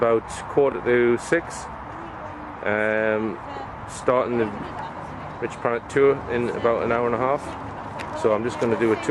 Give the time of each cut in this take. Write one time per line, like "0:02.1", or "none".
none